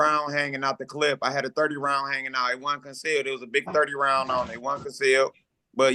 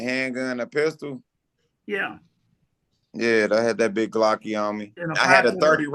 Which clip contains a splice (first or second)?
second